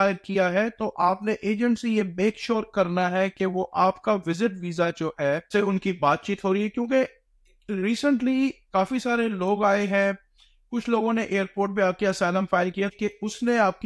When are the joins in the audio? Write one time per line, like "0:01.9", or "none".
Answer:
0:05.5
0:12.9